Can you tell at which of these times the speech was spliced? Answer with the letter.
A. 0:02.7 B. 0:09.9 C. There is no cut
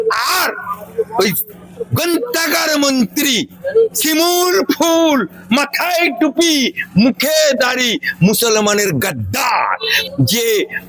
B